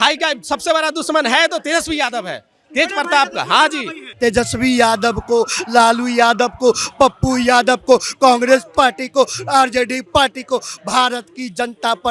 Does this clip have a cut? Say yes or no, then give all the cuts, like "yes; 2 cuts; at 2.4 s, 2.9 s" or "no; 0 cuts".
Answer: yes; 1 cut; at 4.1 s